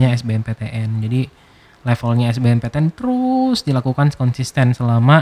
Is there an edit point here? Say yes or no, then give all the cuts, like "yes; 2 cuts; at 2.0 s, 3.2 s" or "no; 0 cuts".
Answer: no; 0 cuts